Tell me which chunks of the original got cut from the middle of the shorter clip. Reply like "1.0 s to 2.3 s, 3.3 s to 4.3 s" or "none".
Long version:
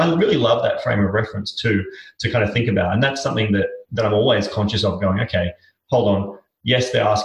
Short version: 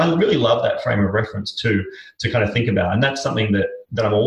none